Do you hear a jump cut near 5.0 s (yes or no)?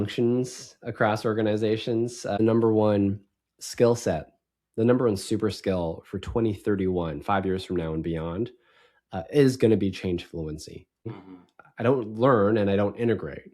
no